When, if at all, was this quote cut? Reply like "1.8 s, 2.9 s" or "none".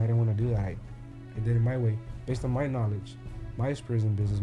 none